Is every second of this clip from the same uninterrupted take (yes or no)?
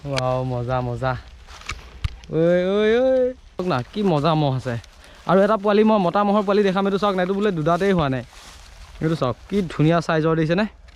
no